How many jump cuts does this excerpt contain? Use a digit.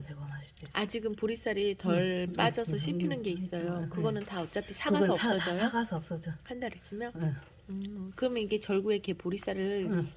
0